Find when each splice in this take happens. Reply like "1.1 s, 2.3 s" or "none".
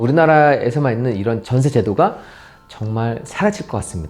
none